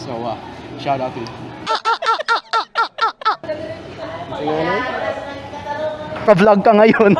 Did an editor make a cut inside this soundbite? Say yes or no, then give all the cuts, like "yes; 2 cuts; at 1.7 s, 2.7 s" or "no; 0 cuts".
yes; 3 cuts; at 1.6 s, 3.4 s, 6.2 s